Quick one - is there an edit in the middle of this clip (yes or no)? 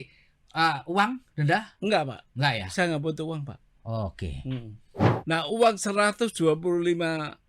yes